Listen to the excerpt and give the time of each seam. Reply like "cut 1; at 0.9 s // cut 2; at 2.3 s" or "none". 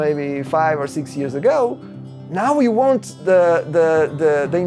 none

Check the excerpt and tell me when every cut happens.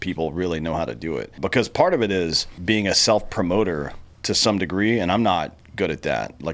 cut 1; at 1.3 s // cut 2; at 2.5 s

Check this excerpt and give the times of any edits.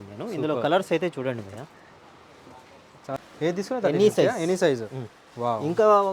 cut 1; at 3.1 s

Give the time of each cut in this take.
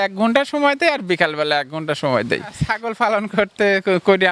cut 1; at 2.7 s

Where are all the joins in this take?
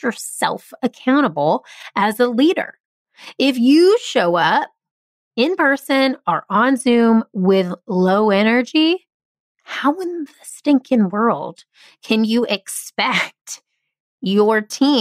none

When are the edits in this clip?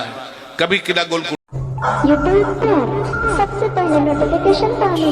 cut 1; at 1.4 s

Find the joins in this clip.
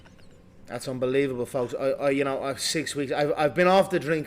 cut 1; at 1.7 s

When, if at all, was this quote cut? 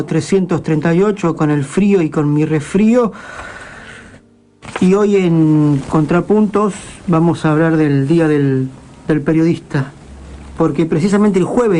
none

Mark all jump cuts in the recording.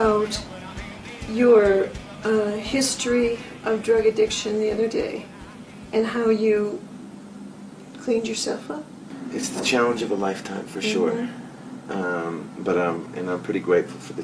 cut 1; at 10.0 s

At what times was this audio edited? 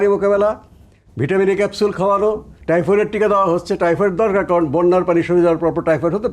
cut 1; at 2.6 s

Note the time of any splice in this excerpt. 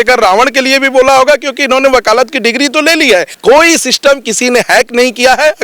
cut 1; at 3.3 s

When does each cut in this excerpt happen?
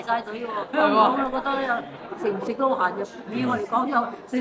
none

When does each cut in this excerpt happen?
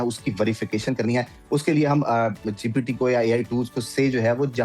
none

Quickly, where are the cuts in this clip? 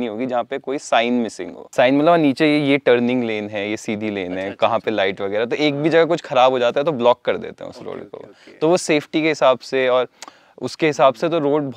none

